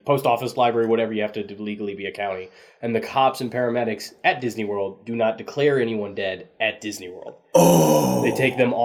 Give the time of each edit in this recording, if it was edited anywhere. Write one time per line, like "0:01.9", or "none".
none